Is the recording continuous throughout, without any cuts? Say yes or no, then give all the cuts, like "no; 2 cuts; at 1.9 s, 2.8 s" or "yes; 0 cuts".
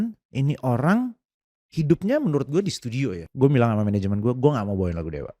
no; 1 cut; at 3.3 s